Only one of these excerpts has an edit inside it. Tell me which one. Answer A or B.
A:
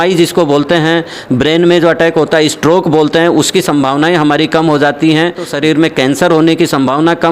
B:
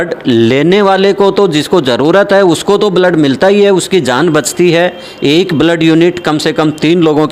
A